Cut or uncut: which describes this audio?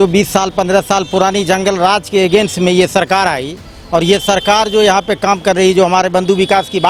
uncut